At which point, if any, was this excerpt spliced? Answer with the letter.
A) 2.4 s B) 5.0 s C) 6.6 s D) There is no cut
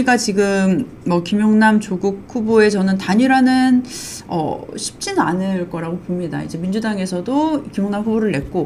D